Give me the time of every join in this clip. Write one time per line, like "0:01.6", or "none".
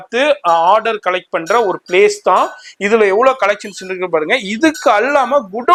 none